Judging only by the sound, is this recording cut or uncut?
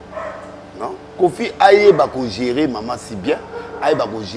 cut